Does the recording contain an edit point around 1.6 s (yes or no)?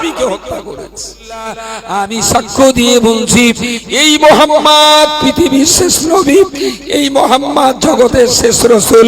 yes